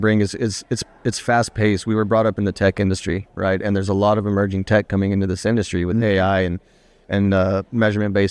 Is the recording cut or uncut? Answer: uncut